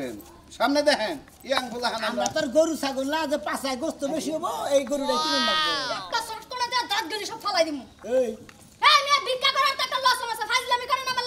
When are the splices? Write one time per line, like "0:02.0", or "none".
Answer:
none